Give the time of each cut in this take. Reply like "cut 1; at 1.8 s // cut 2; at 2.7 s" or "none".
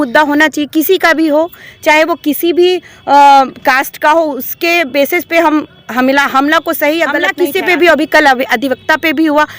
cut 1; at 7.3 s